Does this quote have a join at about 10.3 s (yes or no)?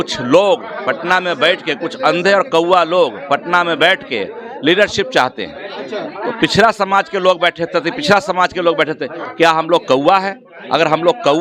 no